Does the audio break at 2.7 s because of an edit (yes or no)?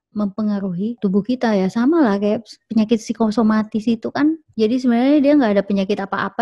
no